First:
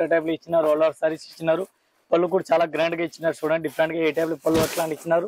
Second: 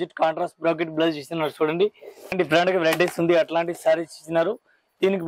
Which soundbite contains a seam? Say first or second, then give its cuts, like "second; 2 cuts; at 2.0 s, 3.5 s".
second; 1 cut; at 2.3 s